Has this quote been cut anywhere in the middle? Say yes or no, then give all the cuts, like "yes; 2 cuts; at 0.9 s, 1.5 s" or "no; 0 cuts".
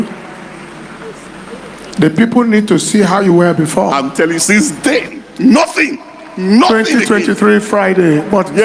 yes; 1 cut; at 3.9 s